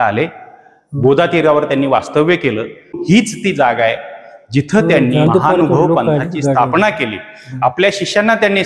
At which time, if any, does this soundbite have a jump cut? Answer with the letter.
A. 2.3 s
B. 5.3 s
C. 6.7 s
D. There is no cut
B